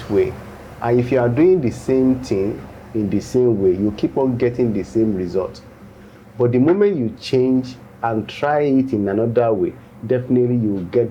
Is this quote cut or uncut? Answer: uncut